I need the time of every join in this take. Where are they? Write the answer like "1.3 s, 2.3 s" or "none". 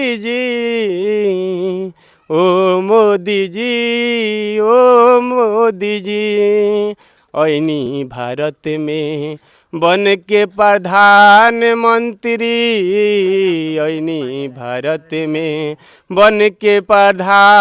none